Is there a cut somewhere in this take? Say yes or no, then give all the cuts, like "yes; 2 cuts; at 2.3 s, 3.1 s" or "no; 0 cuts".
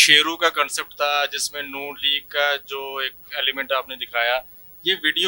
no; 0 cuts